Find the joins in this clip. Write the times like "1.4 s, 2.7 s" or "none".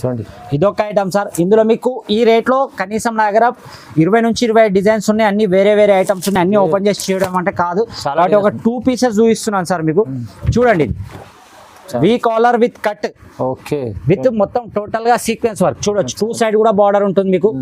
none